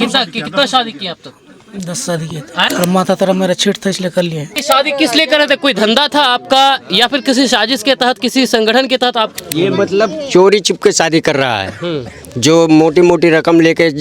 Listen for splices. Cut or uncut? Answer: cut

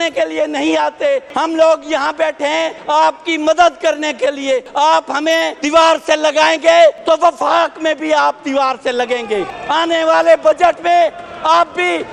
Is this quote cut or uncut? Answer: cut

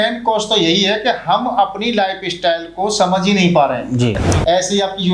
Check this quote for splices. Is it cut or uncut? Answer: cut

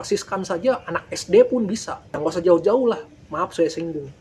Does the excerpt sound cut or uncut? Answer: cut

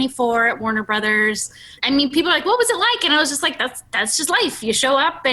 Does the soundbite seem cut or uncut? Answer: cut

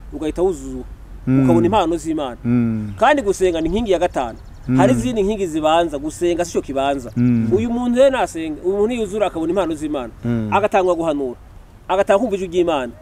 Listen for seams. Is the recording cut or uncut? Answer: cut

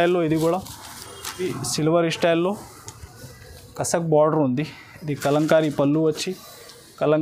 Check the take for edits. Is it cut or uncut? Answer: cut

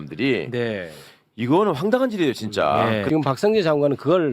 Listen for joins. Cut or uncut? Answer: cut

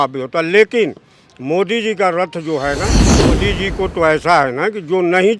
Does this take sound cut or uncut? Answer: cut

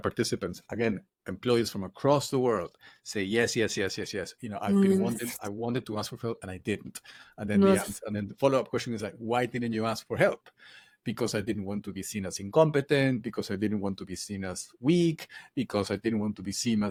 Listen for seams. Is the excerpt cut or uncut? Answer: uncut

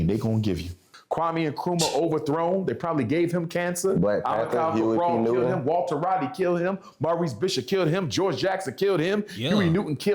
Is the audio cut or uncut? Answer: cut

